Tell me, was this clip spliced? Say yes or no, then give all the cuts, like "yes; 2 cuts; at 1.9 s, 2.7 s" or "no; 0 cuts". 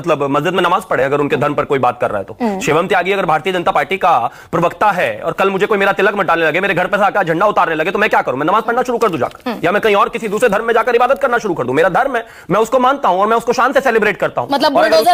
no; 0 cuts